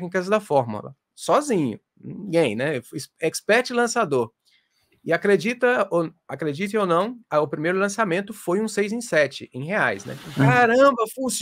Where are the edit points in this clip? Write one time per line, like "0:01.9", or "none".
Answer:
0:01.1
0:10.2